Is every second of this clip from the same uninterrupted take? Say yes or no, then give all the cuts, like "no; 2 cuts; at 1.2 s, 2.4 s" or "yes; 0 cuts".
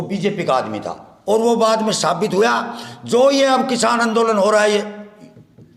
yes; 0 cuts